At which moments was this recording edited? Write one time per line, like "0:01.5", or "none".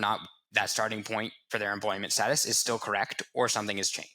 0:01.4